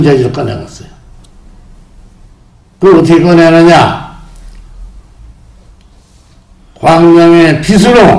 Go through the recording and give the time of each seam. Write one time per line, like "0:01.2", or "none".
0:02.7

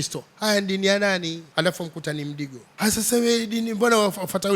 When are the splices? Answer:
0:01.4
0:02.6

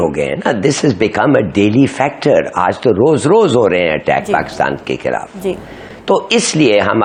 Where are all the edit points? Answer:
none

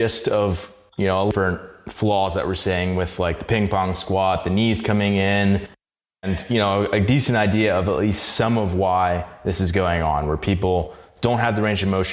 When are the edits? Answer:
0:01.3
0:06.2

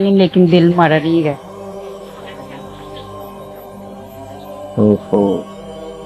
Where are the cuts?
0:01.4
0:04.1

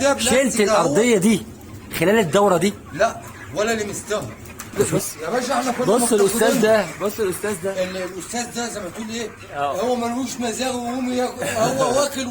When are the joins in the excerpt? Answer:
0:04.8

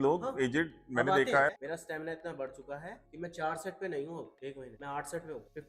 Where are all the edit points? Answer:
0:01.5

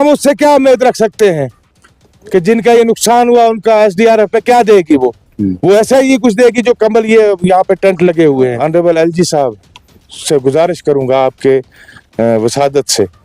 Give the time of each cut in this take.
0:08.6

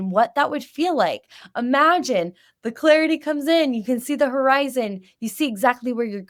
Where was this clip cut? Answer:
none

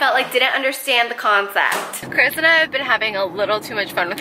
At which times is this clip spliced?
0:02.0

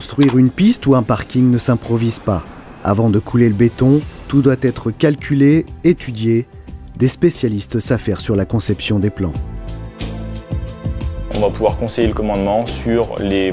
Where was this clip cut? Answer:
none

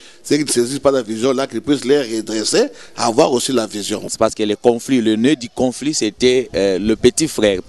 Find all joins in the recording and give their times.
0:04.1

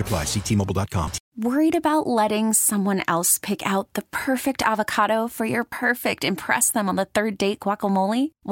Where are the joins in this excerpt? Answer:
0:01.2

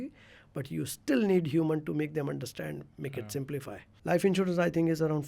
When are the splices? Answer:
0:03.9

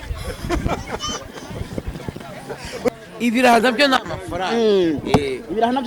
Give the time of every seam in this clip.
0:02.9

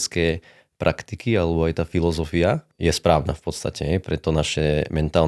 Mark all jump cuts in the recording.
0:02.7

